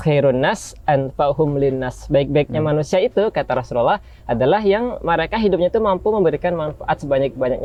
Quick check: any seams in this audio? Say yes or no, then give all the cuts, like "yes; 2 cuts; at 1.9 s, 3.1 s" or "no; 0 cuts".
no; 0 cuts